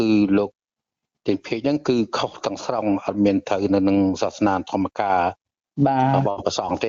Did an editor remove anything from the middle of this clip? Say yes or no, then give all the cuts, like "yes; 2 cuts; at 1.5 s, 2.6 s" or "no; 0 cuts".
no; 0 cuts